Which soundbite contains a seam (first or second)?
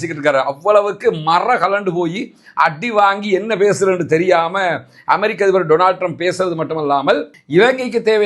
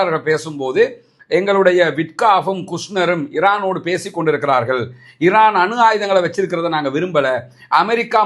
first